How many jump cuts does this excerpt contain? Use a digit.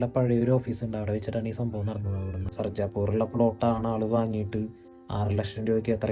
1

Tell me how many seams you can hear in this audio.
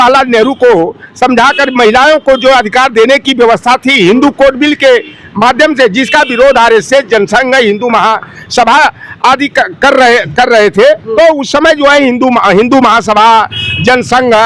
1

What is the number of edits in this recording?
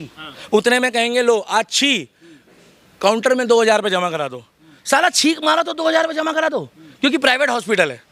0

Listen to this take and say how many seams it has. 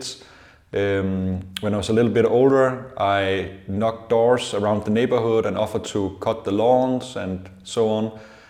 0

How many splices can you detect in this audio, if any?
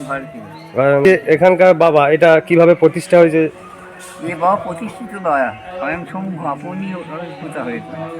1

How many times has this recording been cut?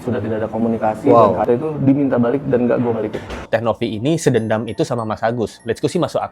2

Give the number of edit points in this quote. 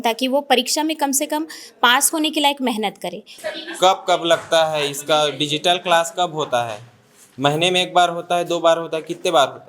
1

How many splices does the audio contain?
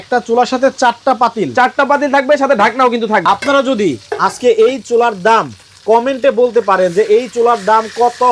1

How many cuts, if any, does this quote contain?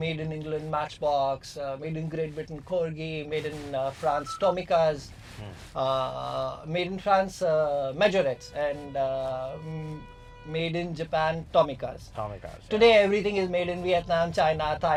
0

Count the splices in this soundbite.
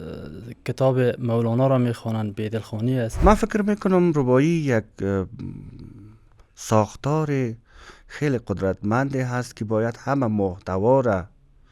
1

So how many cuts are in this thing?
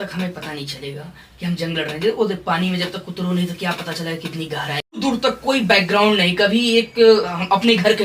1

